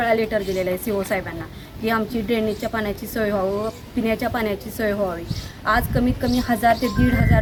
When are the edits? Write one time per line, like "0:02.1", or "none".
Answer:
none

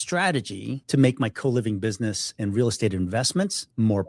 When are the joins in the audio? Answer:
none

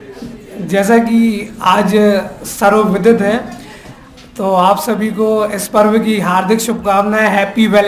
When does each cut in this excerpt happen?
none

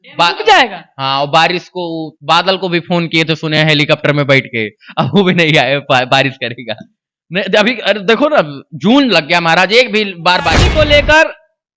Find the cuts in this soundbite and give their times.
0:10.6

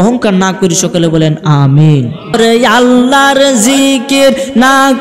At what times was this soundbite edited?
0:02.3

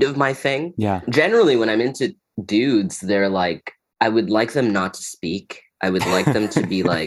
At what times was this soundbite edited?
0:01.1

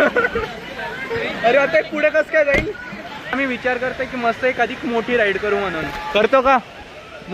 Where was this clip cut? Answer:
0:03.2

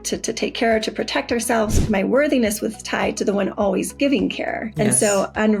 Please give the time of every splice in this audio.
0:01.8
0:04.6

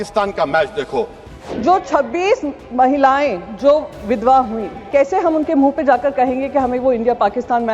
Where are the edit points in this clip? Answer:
0:01.2
0:04.9

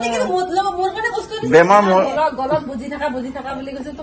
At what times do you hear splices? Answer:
none

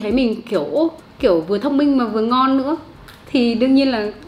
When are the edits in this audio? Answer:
0:01.0

